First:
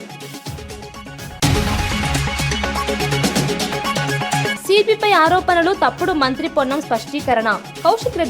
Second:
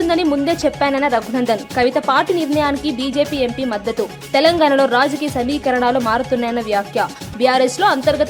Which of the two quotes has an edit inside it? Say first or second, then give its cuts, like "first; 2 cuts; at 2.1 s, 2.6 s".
first; 2 cuts; at 1.3 s, 4.6 s